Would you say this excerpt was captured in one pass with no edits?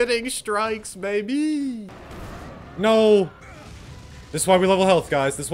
no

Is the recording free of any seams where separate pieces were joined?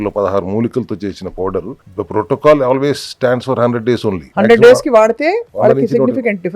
no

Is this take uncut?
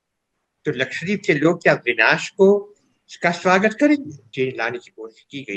no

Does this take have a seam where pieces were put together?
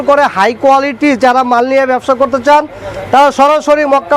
no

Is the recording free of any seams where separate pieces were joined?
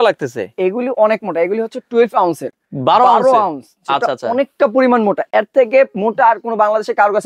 yes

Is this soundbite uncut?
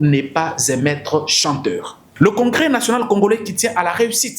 no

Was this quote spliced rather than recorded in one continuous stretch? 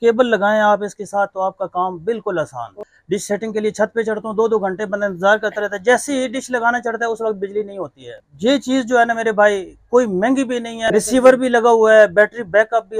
yes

